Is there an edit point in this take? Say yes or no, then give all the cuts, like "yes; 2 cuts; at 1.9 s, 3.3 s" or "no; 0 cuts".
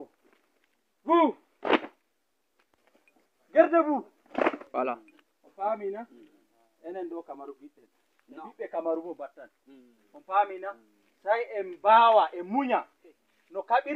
no; 0 cuts